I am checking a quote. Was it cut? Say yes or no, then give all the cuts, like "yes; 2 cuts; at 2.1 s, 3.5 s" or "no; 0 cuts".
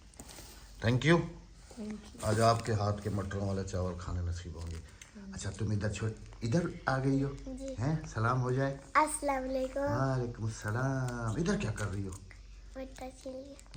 no; 0 cuts